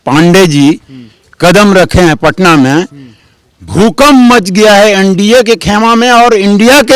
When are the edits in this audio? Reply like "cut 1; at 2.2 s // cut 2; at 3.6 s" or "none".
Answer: none